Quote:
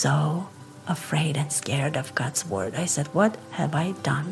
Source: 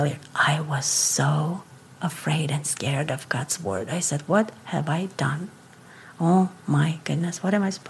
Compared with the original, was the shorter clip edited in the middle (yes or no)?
no